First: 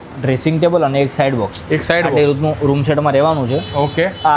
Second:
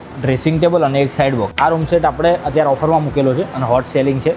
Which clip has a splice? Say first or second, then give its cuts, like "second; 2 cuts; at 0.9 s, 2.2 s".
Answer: second; 1 cut; at 1.5 s